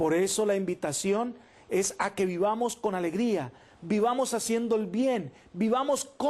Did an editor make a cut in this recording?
yes; 1 cut; at 4.2 s

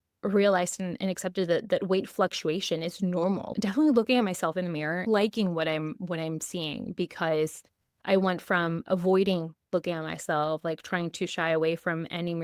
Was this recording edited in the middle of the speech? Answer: yes; 3 cuts; at 3.5 s, 5.0 s, 7.9 s

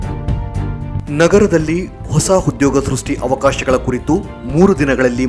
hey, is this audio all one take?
yes; 0 cuts

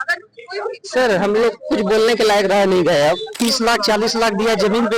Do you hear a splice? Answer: yes; 1 cut; at 3.4 s

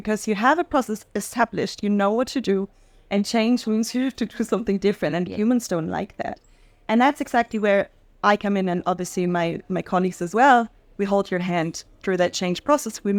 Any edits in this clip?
no; 0 cuts

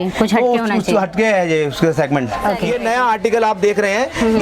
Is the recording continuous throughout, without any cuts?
no; 1 cut; at 2.6 s

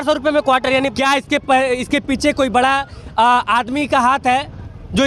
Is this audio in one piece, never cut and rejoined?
no; 1 cut; at 0.9 s

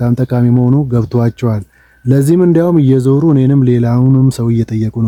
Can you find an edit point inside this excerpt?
no; 0 cuts

